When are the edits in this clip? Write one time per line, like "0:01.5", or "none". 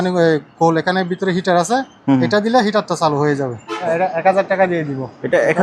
0:03.8